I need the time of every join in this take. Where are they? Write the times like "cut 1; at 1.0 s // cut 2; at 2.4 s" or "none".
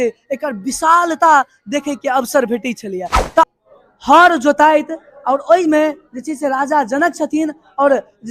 cut 1; at 3.5 s